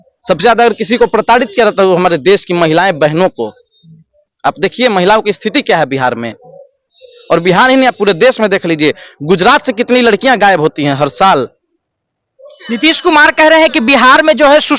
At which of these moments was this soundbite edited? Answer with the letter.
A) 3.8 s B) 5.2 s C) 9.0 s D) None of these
D